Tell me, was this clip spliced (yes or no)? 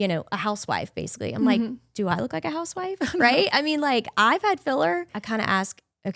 yes